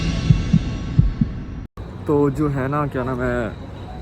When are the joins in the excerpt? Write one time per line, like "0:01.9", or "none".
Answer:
0:01.9